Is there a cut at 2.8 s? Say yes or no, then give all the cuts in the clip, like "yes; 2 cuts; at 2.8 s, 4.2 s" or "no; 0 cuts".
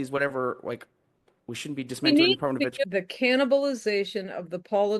yes; 1 cut; at 2.8 s